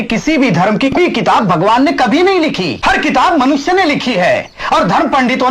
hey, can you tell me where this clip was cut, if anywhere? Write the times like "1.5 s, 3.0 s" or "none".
1.0 s, 2.7 s

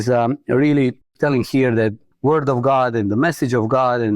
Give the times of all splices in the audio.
1.1 s, 2.1 s

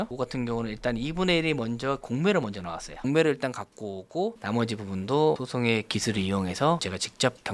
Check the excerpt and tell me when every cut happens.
2.9 s, 4.4 s

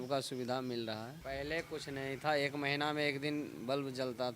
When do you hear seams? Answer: 1.2 s

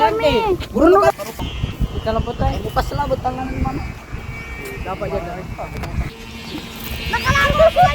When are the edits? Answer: 1.4 s, 6.1 s

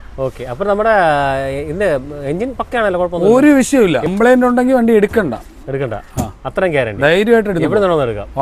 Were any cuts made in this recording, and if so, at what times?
4.1 s

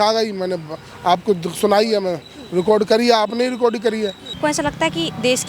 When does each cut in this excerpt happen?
4.4 s

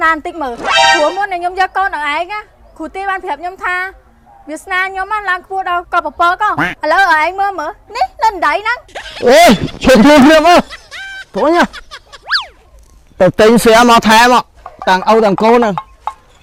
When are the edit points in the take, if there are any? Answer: none

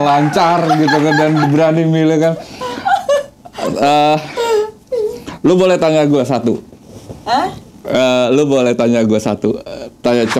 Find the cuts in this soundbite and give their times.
none

